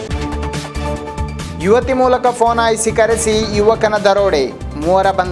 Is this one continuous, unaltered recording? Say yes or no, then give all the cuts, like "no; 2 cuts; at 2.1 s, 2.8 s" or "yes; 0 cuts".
no; 1 cut; at 1.4 s